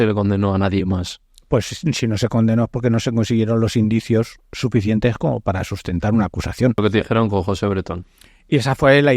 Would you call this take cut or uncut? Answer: cut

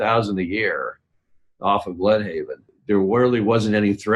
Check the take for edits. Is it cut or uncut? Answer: cut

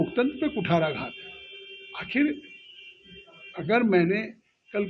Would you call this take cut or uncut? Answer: uncut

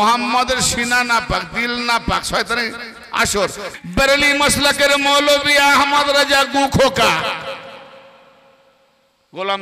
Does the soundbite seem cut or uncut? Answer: cut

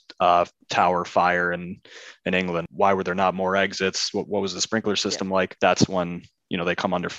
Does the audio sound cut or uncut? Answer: cut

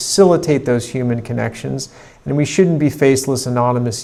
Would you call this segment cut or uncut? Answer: uncut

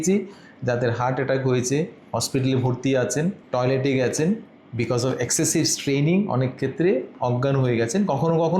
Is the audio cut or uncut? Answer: uncut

